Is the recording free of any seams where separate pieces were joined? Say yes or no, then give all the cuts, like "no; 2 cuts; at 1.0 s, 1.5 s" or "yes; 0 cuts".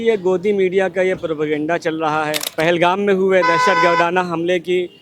no; 1 cut; at 2.4 s